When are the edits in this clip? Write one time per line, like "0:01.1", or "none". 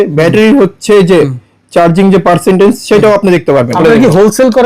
0:03.7